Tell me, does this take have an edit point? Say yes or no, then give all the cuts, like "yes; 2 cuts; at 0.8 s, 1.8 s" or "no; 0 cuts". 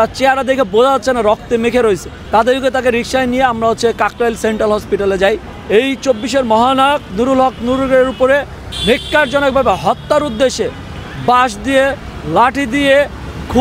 yes; 2 cuts; at 2.1 s, 5.5 s